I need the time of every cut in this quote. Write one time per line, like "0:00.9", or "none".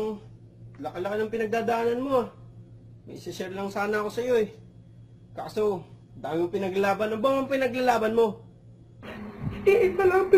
0:08.2